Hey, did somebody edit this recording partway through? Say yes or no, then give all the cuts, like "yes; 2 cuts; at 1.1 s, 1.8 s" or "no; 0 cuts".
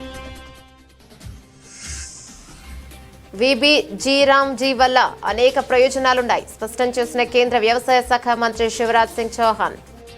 no; 0 cuts